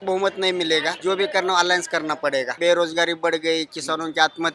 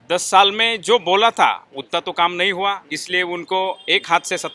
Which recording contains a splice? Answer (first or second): first